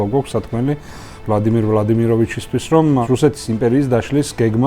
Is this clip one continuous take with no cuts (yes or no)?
no